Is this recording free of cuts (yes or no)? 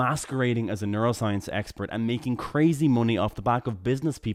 yes